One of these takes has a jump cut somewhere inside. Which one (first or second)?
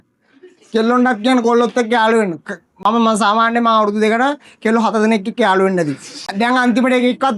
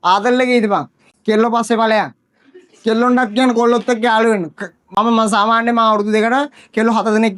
first